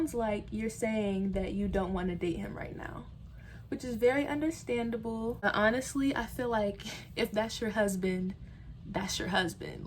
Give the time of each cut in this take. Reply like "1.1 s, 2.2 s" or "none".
5.4 s